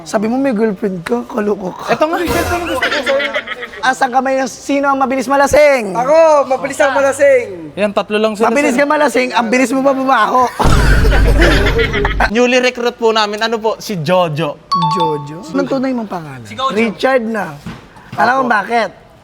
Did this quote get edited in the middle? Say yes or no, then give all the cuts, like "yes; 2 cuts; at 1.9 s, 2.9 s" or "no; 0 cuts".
yes; 3 cuts; at 3.8 s, 12.3 s, 15.5 s